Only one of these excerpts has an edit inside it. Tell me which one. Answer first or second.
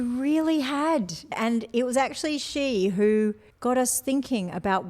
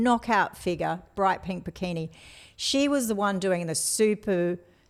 first